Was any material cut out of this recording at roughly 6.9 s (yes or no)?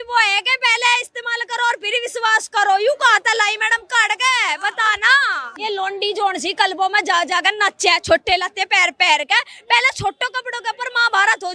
no